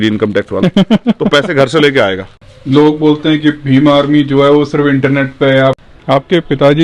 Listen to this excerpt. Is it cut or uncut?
cut